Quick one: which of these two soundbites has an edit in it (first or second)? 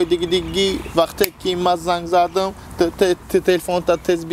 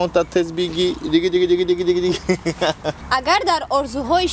second